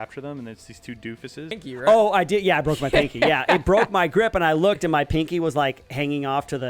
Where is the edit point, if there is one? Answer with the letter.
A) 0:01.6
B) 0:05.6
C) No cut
A